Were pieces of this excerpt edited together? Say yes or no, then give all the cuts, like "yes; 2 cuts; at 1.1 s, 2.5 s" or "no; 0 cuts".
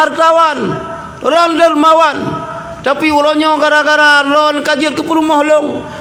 no; 0 cuts